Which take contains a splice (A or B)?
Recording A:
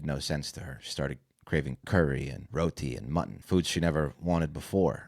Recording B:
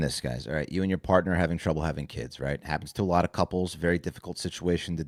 A